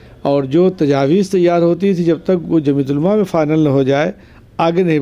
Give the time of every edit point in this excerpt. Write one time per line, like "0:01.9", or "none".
none